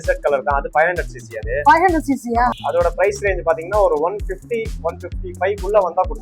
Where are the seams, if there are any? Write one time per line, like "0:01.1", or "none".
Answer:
0:02.5